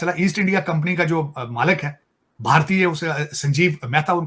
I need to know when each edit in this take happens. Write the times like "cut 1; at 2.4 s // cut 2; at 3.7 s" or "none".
none